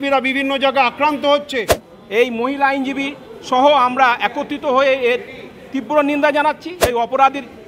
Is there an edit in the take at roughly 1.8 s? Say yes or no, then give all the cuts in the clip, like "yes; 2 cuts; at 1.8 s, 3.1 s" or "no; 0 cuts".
yes; 2 cuts; at 1.8 s, 6.7 s